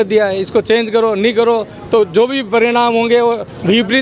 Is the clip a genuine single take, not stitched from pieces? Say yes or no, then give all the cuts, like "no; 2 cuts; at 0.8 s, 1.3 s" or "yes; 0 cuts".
yes; 0 cuts